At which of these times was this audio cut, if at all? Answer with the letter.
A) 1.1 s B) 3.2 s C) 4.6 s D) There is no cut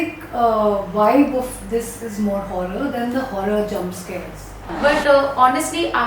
C